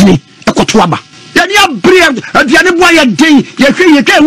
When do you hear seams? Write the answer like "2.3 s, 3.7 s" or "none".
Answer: 1.1 s